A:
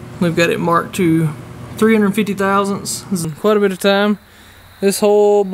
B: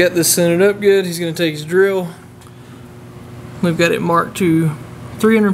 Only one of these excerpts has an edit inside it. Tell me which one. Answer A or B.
A